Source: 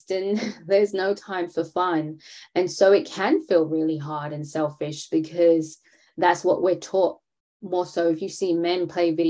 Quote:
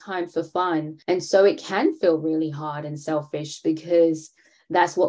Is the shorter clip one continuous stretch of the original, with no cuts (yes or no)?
no